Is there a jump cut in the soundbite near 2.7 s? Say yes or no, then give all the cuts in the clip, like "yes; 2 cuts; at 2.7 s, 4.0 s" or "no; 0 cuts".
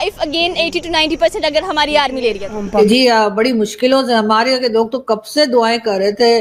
yes; 1 cut; at 2.7 s